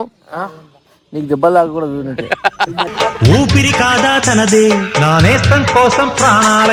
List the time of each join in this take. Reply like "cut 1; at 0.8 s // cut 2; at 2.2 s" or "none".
none